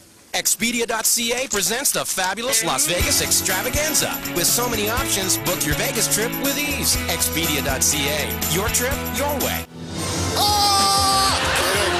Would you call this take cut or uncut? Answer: cut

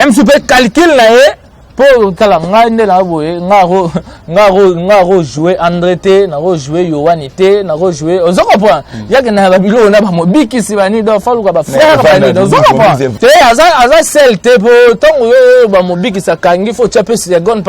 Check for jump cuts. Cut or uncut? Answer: cut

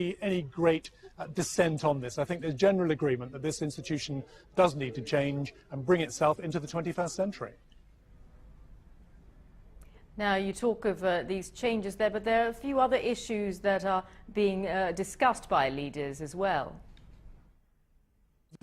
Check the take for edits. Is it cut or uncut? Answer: cut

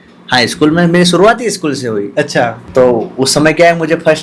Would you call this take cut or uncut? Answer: cut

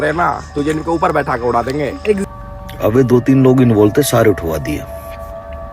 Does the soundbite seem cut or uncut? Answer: cut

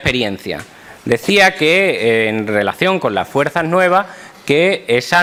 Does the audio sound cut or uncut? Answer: uncut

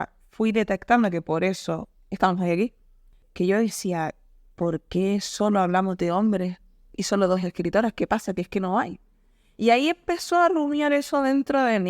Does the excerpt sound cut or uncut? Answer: cut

